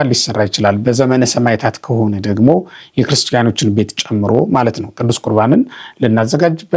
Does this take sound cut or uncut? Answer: uncut